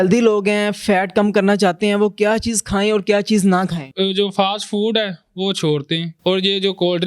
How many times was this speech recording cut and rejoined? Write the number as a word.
two